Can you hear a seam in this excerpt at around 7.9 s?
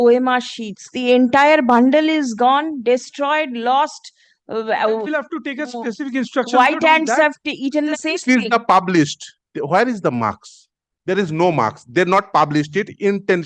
yes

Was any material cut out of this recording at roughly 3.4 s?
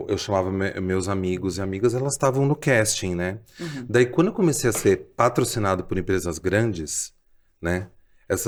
no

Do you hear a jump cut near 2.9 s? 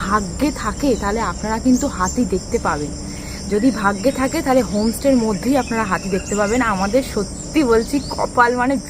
no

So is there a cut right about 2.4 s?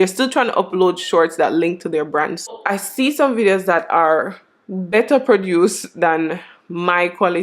yes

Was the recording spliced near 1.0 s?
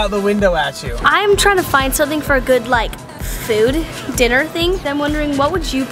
yes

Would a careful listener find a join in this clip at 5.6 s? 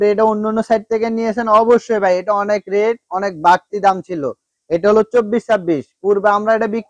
no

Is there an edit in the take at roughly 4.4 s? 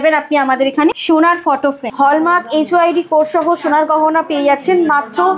no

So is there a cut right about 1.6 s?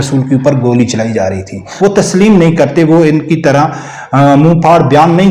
yes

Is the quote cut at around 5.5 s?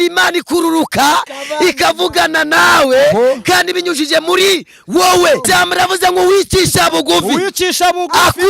yes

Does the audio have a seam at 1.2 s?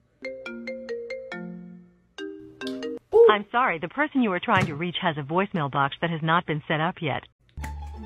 no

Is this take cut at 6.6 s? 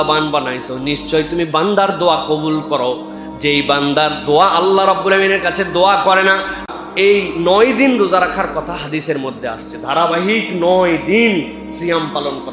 yes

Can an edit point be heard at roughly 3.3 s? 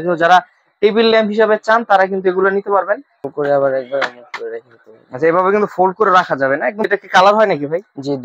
yes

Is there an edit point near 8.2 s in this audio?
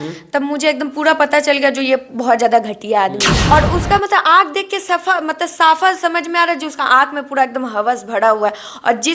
no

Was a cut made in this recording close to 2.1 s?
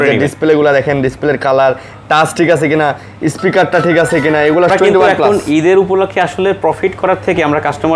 no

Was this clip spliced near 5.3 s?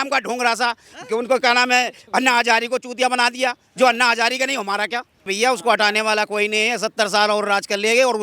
yes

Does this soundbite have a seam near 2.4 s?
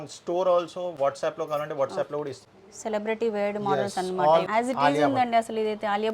yes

